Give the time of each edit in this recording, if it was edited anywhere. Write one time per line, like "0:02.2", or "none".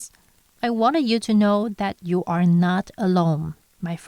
none